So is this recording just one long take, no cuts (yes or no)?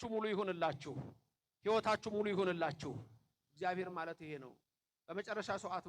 yes